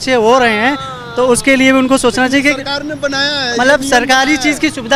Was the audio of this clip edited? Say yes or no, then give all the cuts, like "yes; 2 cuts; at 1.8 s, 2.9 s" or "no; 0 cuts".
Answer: no; 0 cuts